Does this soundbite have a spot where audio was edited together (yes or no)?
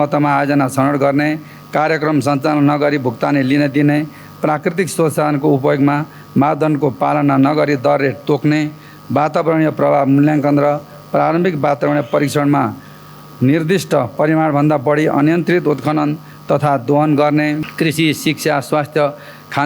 yes